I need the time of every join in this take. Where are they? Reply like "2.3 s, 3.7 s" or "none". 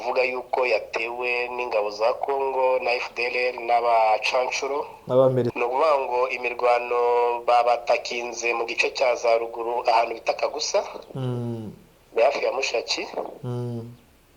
5.5 s